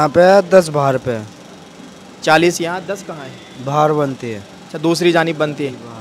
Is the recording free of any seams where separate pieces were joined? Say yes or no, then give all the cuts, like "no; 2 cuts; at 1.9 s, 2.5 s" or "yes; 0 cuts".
yes; 0 cuts